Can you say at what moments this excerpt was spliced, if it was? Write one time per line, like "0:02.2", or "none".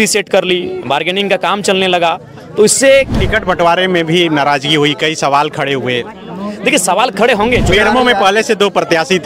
0:03.1
0:07.7